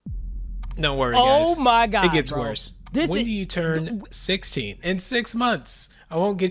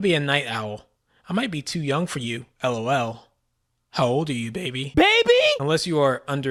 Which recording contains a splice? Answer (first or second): first